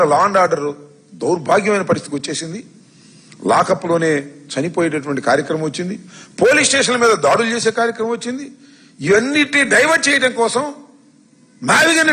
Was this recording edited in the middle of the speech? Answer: no; 0 cuts

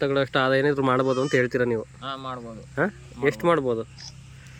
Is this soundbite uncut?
yes; 0 cuts

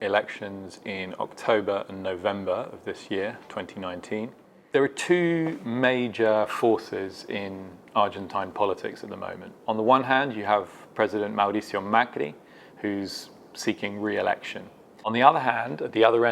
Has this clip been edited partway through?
yes; 2 cuts; at 4.5 s, 15.1 s

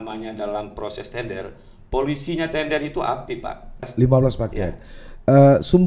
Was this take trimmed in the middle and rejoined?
yes; 1 cut; at 3.9 s

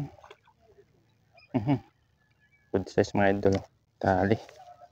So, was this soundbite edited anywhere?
yes; 1 cut; at 3.8 s

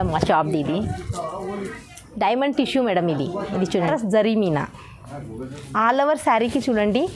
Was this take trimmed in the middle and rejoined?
yes; 1 cut; at 3.9 s

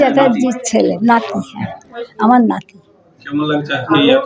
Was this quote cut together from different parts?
no; 0 cuts

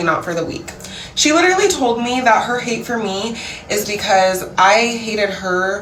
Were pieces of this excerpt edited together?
no; 0 cuts

